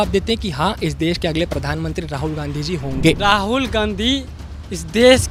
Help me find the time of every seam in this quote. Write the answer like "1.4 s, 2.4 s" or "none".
none